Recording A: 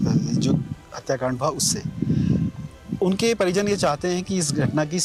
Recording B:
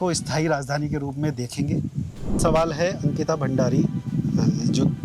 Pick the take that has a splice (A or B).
B